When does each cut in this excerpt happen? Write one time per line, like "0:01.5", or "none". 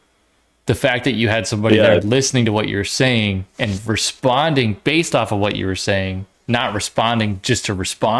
none